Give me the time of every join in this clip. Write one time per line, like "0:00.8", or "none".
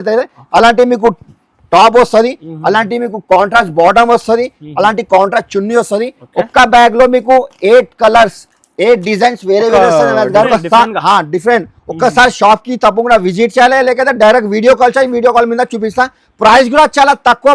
0:10.5